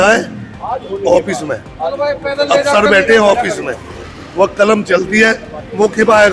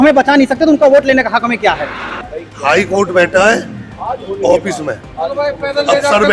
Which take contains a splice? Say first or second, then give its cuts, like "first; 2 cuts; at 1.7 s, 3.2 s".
second; 1 cut; at 2.2 s